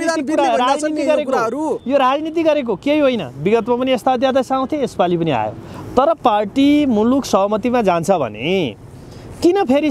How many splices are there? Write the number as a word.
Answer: zero